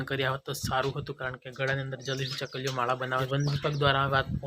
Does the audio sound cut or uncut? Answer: cut